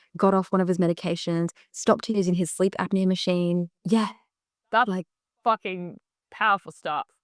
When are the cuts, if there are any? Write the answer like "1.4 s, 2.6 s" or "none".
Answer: 3.8 s